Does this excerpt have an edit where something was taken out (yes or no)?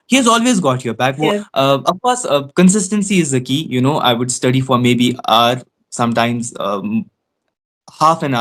yes